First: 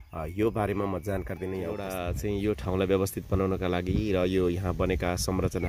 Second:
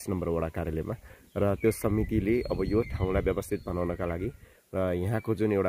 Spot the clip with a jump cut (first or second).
first